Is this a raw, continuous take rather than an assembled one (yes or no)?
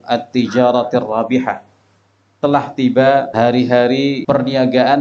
no